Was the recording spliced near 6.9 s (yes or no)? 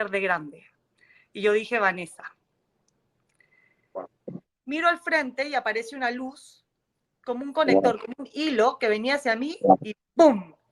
no